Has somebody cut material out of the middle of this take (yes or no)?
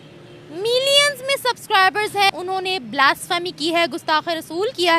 yes